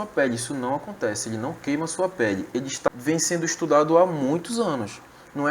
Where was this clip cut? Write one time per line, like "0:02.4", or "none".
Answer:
0:02.9